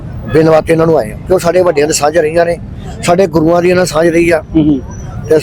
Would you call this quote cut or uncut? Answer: uncut